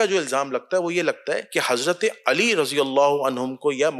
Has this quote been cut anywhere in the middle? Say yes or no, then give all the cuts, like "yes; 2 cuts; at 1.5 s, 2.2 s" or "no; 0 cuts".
yes; 1 cut; at 1.4 s